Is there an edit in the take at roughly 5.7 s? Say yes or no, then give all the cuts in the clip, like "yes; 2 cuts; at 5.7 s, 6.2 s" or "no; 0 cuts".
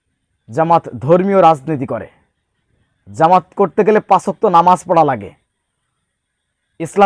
no; 0 cuts